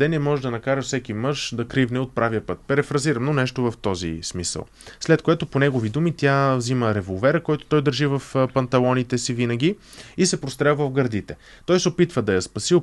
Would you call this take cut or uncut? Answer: uncut